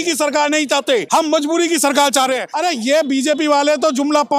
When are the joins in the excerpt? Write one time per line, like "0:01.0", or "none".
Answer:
0:01.1
0:02.5